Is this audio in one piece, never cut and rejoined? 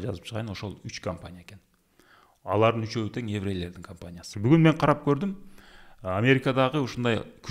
no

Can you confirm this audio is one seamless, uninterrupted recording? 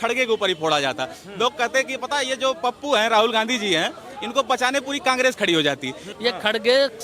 no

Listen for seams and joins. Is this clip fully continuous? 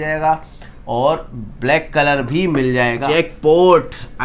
no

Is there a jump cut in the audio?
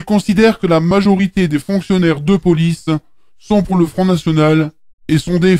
no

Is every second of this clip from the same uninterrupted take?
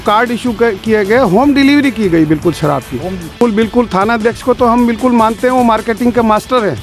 no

